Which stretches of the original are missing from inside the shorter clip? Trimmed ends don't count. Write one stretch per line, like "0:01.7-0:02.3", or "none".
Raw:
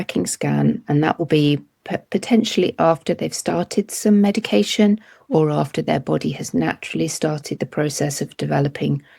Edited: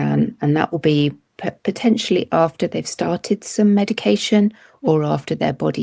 none